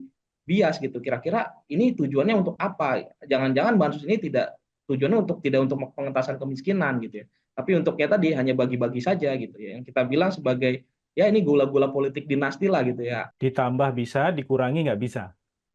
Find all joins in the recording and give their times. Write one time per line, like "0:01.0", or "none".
0:13.3